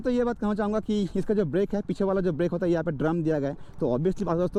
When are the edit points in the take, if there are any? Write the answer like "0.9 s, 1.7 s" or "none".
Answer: none